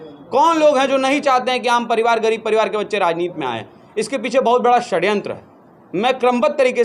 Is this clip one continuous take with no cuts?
yes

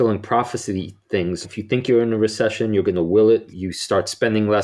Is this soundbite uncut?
no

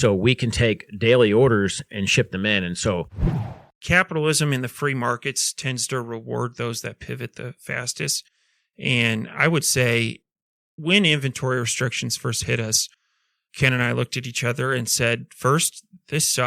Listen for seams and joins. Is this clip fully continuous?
no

